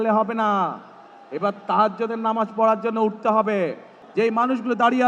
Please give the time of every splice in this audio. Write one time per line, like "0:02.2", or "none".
0:04.0